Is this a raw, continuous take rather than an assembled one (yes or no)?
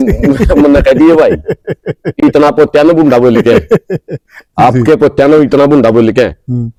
yes